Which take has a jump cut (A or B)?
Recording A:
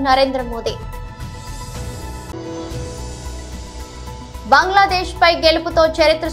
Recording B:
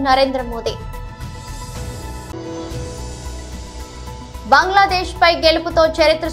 A